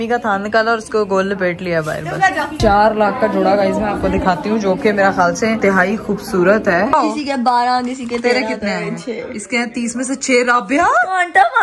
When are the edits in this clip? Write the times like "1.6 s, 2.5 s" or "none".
2.5 s, 5.6 s, 6.9 s